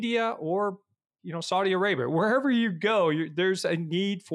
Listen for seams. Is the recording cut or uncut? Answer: uncut